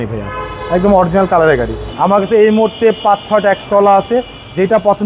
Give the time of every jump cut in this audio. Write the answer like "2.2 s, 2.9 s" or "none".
1.8 s